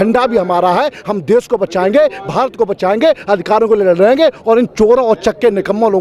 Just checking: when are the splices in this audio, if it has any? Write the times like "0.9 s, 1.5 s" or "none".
none